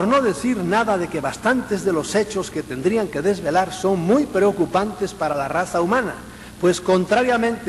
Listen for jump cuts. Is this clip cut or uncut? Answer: uncut